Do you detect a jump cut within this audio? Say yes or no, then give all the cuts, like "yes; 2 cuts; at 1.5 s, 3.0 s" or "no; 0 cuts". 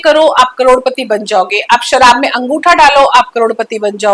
no; 0 cuts